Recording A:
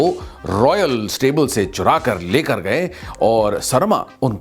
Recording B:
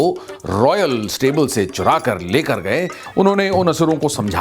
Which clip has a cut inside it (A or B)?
B